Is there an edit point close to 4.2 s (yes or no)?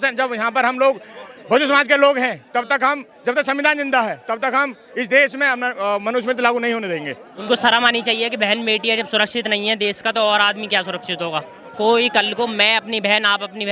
no